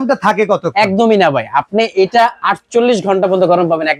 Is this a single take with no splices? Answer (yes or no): yes